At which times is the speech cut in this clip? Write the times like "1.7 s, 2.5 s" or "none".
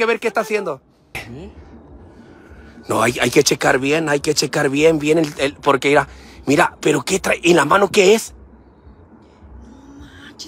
1.1 s